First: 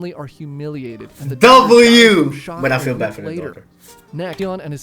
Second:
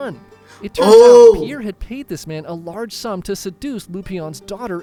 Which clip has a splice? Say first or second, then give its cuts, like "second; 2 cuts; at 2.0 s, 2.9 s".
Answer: first; 1 cut; at 1.0 s